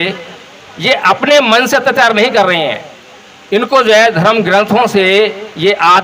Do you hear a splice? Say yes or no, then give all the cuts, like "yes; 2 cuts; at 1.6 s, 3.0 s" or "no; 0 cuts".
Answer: no; 0 cuts